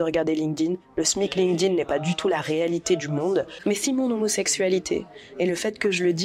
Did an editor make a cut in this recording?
yes; 1 cut; at 3.6 s

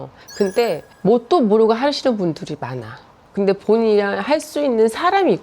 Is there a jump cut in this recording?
yes; 1 cut; at 3.2 s

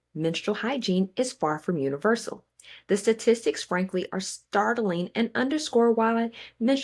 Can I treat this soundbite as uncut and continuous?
yes; 0 cuts

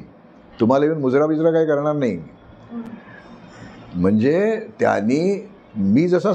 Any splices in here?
no; 0 cuts

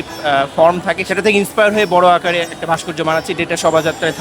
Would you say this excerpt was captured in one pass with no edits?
no; 1 cut; at 1.0 s

